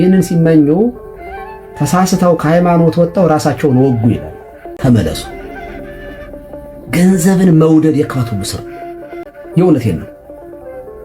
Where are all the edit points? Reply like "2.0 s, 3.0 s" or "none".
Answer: 4.6 s, 9.2 s